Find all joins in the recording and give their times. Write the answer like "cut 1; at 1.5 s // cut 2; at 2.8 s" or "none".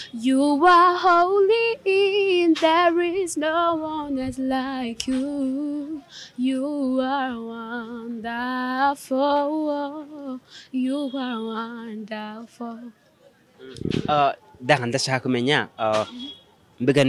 none